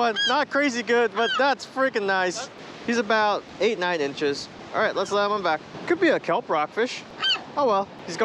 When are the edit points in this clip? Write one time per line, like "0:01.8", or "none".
0:02.5